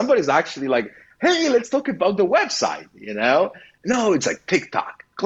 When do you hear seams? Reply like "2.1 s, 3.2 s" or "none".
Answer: 3.7 s